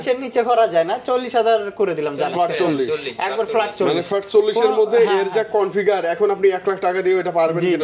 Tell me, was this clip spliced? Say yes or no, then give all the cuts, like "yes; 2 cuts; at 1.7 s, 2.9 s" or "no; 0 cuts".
no; 0 cuts